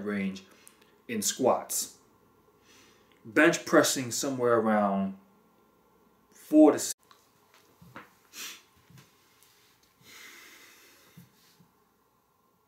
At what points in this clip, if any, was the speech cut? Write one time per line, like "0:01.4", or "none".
none